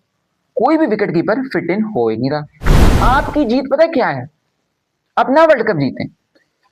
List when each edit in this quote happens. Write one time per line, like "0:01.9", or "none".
0:02.8